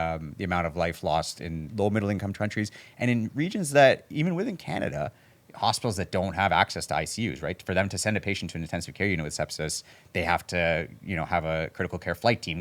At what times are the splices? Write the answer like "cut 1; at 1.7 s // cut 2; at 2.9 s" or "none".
cut 1; at 1.6 s

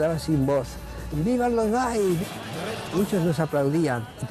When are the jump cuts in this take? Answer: none

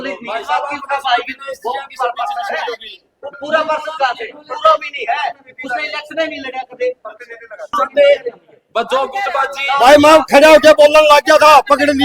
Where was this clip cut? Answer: cut 1; at 7.7 s

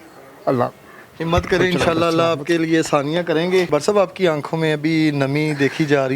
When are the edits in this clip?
cut 1; at 3.7 s

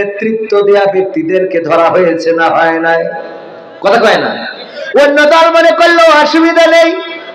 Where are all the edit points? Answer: none

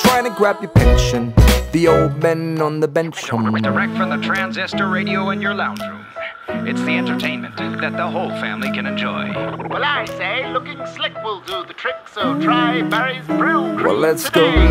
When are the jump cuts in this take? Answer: cut 1; at 13.8 s

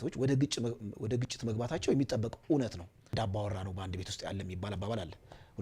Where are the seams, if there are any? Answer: cut 1; at 3.1 s

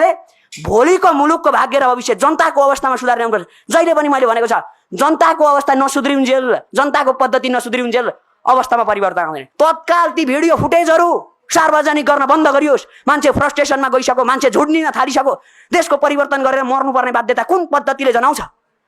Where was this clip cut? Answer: cut 1; at 9.4 s

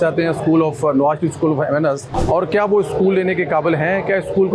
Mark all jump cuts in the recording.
cut 1; at 2.0 s

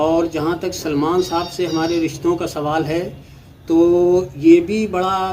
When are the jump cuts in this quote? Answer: none

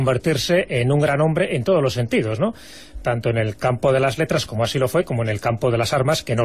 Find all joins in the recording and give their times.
cut 1; at 4.9 s

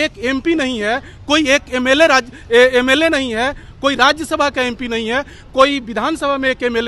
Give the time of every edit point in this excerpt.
none

